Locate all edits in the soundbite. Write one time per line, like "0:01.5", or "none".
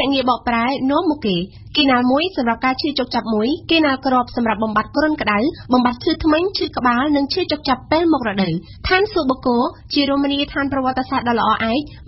0:01.5
0:08.7